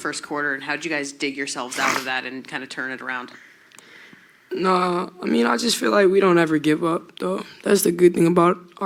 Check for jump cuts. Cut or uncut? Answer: uncut